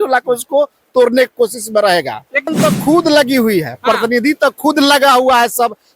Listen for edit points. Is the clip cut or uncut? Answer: cut